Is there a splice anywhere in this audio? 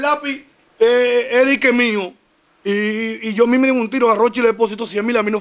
no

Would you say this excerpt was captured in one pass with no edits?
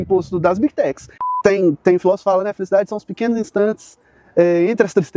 no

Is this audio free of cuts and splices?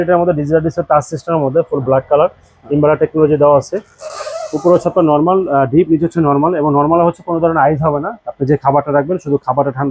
yes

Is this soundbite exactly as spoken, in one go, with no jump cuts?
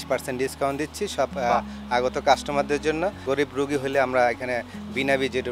no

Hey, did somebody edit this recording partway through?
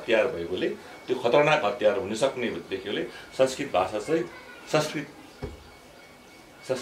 no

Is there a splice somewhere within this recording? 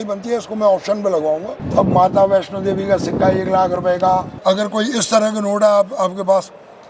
yes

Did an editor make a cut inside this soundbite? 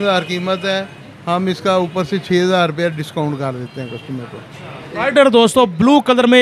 no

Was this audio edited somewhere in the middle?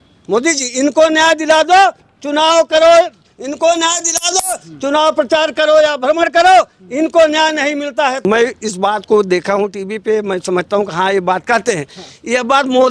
yes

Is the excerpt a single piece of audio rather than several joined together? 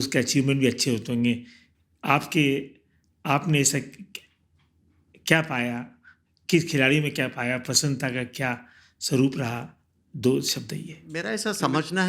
no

